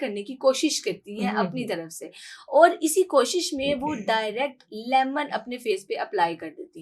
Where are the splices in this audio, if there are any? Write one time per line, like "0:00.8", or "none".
none